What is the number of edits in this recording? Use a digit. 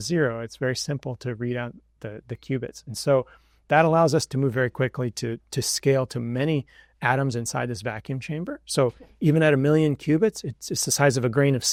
0